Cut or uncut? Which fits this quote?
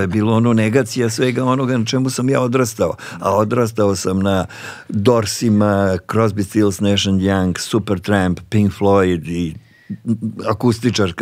uncut